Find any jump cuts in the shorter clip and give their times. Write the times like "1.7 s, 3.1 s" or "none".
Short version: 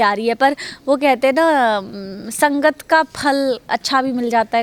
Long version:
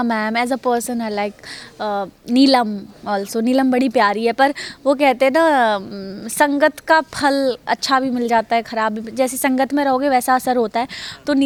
none